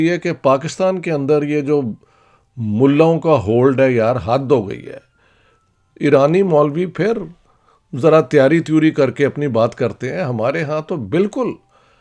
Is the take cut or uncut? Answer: uncut